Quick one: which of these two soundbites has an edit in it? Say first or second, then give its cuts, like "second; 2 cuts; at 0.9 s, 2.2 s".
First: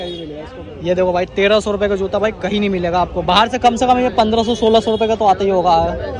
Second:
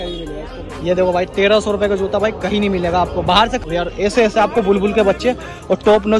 second; 1 cut; at 3.6 s